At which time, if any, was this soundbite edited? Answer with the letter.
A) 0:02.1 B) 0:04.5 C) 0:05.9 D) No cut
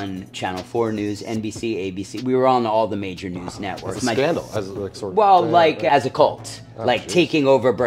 C